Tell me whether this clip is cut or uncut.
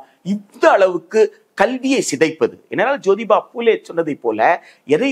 uncut